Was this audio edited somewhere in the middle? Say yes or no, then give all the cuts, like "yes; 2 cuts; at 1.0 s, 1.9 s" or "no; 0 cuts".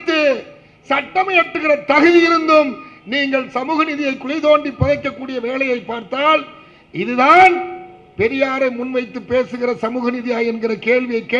no; 0 cuts